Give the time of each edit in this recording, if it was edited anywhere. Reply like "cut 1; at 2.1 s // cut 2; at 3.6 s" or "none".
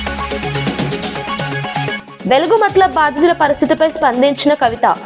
cut 1; at 2.0 s